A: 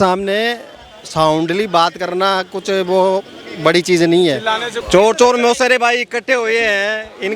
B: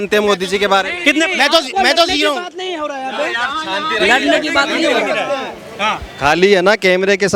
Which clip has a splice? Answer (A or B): A